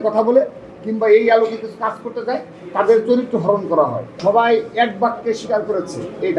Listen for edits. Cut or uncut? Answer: cut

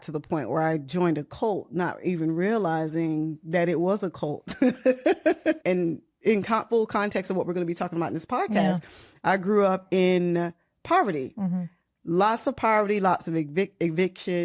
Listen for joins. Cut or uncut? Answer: cut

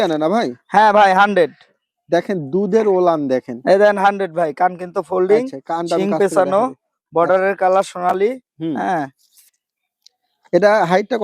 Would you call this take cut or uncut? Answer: uncut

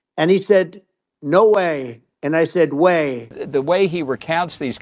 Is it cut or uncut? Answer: cut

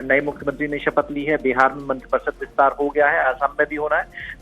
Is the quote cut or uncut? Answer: cut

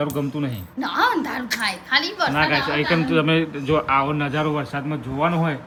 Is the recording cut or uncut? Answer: uncut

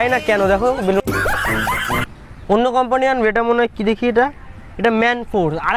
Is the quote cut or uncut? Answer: cut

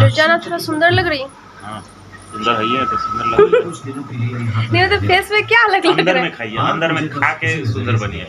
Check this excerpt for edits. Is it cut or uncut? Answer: cut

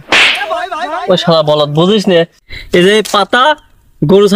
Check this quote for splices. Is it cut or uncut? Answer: uncut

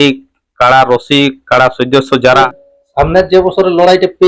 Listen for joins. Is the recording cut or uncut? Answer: cut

